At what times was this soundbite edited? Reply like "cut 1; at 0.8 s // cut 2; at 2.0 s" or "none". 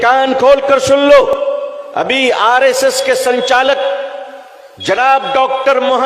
cut 1; at 1.3 s